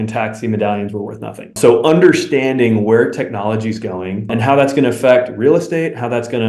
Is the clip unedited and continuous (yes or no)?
no